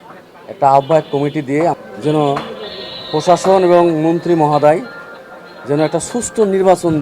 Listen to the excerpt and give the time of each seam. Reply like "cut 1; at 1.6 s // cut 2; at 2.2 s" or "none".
cut 1; at 1.7 s